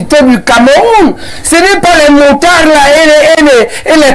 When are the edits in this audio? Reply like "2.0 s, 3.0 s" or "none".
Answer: none